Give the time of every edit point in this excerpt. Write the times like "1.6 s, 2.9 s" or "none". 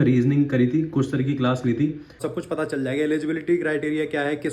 2.1 s